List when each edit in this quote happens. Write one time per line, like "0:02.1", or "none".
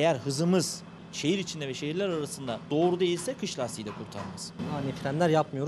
0:01.1
0:04.5